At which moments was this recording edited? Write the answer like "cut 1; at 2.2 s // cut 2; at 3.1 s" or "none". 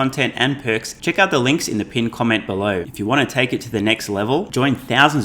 cut 1; at 0.9 s // cut 2; at 2.9 s